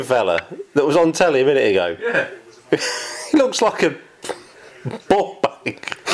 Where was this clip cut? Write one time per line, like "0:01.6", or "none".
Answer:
none